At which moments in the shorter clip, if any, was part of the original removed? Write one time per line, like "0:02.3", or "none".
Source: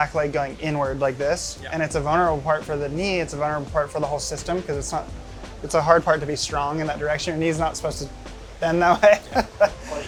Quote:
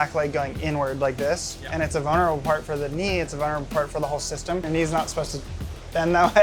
0:04.7

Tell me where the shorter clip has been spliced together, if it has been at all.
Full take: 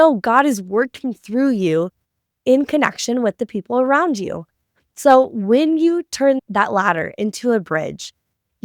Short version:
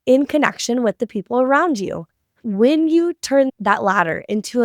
0:02.5

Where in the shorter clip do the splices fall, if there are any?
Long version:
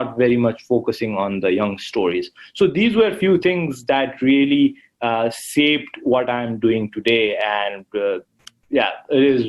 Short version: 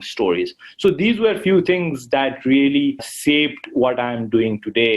0:03.1

